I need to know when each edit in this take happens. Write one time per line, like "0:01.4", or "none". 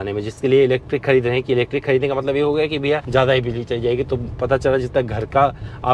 0:03.0